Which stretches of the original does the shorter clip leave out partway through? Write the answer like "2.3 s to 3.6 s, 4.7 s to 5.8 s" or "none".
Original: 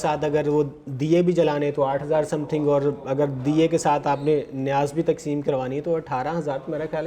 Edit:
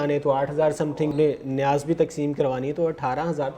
2.6 s to 4.2 s